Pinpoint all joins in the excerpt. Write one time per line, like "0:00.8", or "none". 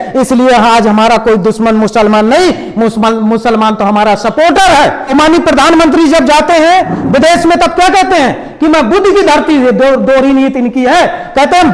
0:05.1